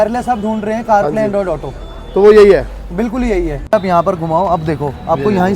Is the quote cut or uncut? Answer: cut